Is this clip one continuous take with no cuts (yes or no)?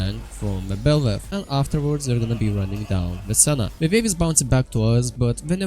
no